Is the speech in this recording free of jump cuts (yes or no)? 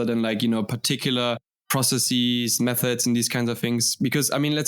no